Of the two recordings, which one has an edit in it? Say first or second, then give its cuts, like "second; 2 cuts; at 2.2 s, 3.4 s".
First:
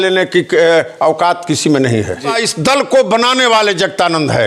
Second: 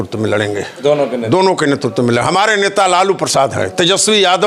first; 1 cut; at 2.3 s